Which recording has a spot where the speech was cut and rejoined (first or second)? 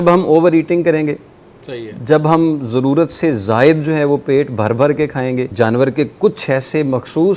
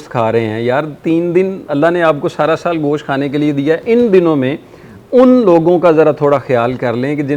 first